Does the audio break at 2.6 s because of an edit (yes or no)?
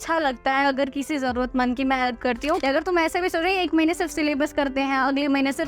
yes